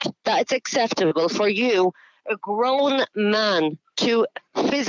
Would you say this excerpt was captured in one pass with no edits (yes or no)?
yes